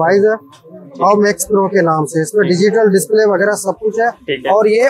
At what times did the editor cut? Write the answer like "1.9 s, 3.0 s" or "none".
none